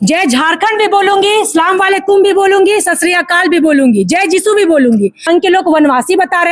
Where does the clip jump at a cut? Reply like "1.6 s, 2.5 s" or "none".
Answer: 5.2 s